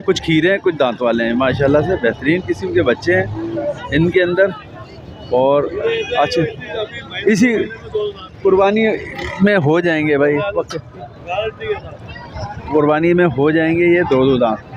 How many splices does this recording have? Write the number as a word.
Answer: zero